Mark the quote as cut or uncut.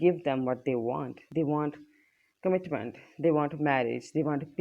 uncut